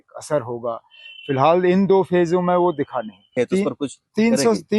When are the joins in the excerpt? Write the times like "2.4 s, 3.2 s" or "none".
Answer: 3.3 s